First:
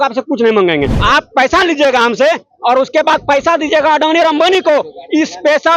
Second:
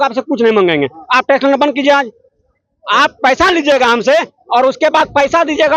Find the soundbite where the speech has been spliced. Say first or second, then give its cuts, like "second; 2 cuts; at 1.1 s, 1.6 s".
first; 1 cut; at 1.0 s